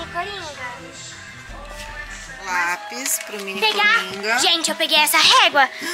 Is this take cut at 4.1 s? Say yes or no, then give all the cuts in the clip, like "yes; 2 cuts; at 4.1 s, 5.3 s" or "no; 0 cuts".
no; 1 cut; at 2.3 s